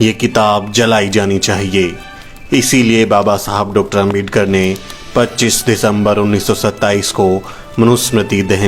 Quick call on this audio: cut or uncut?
uncut